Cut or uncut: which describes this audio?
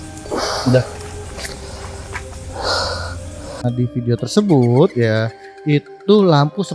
cut